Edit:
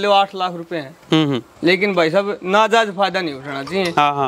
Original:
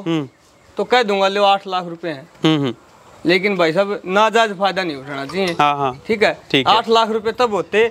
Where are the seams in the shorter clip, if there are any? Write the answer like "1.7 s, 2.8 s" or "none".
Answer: 1.5 s